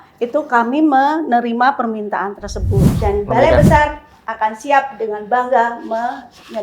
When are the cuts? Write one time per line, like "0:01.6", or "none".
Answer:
0:02.9